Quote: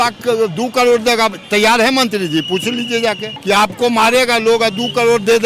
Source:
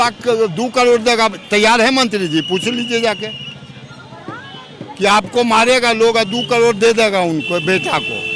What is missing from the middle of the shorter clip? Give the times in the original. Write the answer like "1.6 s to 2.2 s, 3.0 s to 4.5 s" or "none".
3.3 s to 4.8 s